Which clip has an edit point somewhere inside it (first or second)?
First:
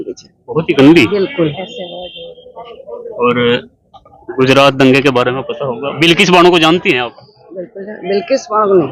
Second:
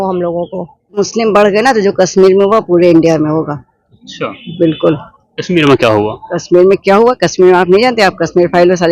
second